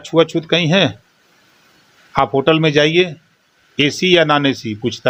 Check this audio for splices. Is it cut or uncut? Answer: uncut